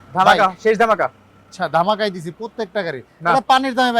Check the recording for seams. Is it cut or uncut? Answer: uncut